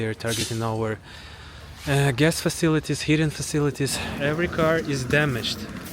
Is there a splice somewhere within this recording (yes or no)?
yes